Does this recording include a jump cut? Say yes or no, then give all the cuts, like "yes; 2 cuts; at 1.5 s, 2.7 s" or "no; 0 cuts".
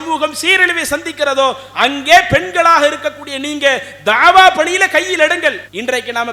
no; 0 cuts